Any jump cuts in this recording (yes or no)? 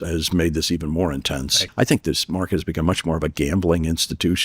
yes